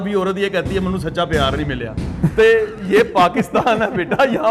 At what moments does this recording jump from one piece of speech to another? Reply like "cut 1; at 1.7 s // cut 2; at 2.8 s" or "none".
none

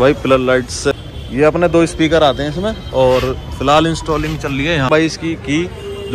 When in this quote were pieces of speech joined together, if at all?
cut 1; at 0.9 s // cut 2; at 4.9 s

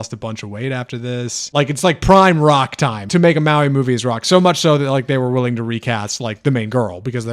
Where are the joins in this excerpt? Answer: cut 1; at 1.5 s // cut 2; at 3.0 s

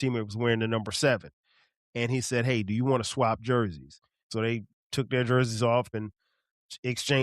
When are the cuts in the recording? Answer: cut 1; at 4.3 s // cut 2; at 5.9 s

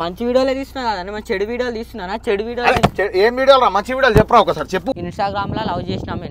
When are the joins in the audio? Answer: cut 1; at 4.9 s

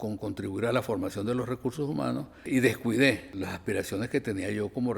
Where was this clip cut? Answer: cut 1; at 2.5 s // cut 2; at 3.3 s

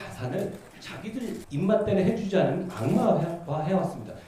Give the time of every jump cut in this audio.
cut 1; at 1.0 s

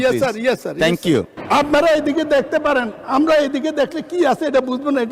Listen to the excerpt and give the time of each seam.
cut 1; at 1.4 s

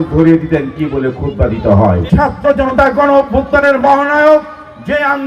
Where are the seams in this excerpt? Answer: cut 1; at 2.0 s

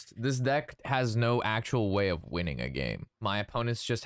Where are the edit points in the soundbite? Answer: cut 1; at 3.1 s

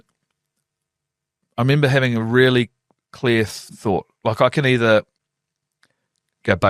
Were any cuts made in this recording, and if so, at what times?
cut 1; at 3.6 s

